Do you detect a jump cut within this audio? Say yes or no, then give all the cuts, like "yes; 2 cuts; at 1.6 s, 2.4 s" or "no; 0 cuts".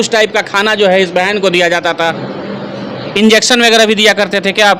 yes; 1 cut; at 2.3 s